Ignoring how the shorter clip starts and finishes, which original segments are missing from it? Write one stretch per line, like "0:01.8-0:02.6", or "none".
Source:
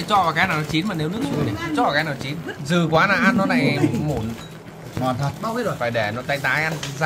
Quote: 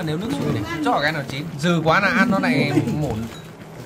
0:02.3-0:02.5